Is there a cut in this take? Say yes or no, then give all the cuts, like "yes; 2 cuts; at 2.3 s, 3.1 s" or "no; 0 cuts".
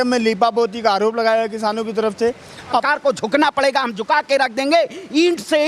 yes; 1 cut; at 2.7 s